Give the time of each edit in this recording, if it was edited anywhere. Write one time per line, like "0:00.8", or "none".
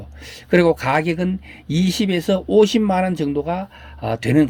none